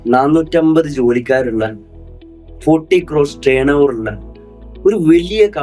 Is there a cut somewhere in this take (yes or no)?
no